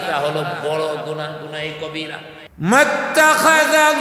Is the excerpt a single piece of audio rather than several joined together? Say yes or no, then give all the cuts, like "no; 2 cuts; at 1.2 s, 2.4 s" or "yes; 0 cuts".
no; 1 cut; at 2.4 s